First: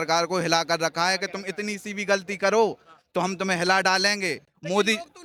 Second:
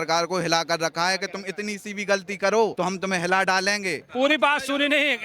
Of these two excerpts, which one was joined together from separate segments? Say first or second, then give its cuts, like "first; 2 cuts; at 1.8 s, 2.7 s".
second; 2 cuts; at 2.7 s, 4.0 s